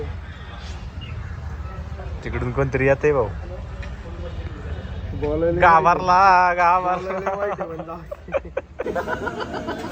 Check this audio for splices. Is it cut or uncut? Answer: cut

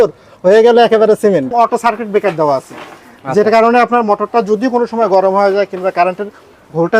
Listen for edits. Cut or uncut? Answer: cut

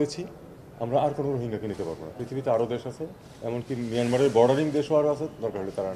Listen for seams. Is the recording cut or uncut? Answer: uncut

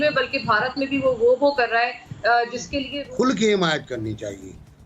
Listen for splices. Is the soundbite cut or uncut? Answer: cut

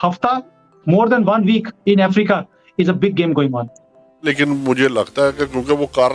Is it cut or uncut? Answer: cut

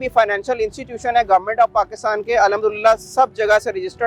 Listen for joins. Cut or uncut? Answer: uncut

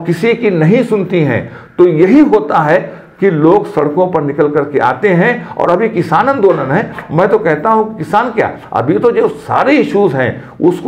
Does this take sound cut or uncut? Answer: uncut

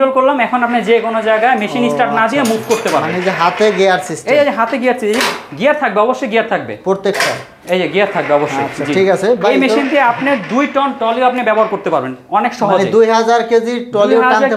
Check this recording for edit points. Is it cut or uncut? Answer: uncut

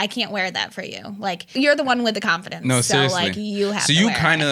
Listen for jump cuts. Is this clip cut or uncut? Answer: cut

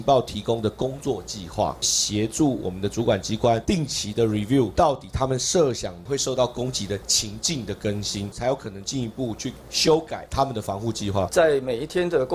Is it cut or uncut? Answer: cut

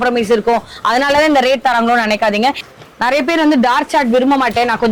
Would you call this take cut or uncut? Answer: cut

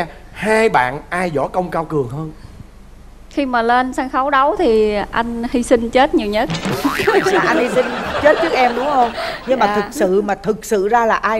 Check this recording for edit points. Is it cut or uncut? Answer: uncut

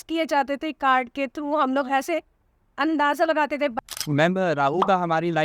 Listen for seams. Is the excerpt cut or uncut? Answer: cut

